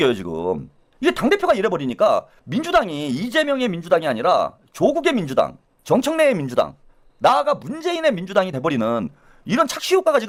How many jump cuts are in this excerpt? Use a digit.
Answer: 0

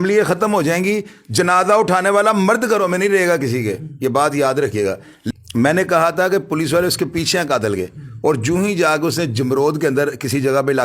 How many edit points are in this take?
1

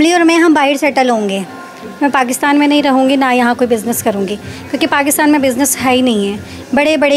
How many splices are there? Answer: 0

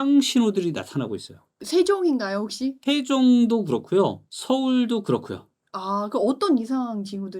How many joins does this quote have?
1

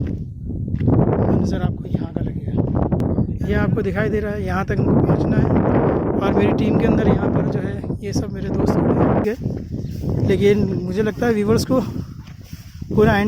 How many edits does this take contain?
2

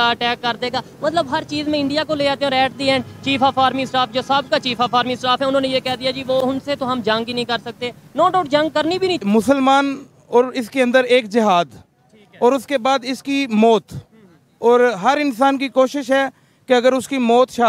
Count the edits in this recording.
1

